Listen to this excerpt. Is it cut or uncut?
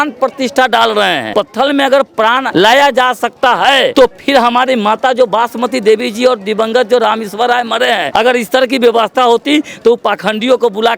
cut